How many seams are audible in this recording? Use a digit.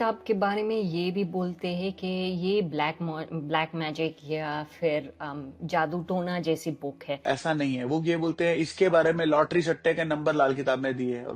1